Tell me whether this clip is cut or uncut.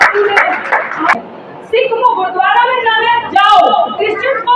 cut